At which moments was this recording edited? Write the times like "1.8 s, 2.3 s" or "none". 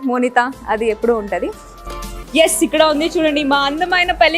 2.1 s